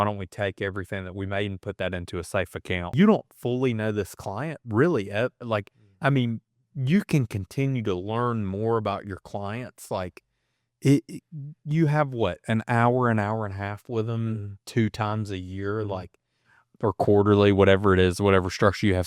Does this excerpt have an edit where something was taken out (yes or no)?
yes